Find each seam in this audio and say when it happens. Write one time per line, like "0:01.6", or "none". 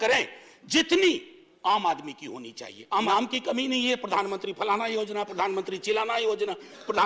0:03.1